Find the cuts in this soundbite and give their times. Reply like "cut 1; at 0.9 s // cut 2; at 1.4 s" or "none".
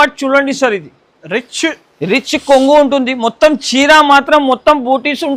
none